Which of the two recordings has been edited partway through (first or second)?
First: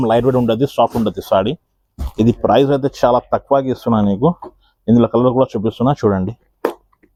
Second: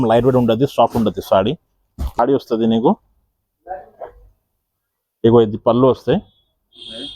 second